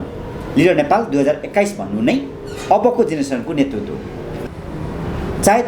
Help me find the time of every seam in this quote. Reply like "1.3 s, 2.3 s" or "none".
4.3 s